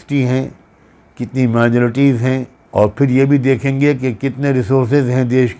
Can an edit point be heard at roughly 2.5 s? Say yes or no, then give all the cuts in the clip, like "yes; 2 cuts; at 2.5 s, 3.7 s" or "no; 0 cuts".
yes; 1 cut; at 2.5 s